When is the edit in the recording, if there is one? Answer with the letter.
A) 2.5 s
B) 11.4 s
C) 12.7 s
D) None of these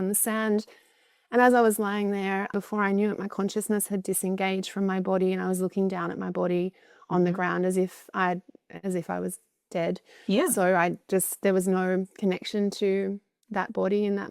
A